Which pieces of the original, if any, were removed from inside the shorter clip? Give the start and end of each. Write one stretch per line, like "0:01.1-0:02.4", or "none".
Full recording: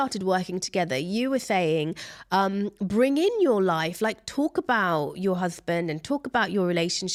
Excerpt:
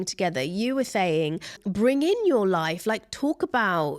0:02.2-0:02.8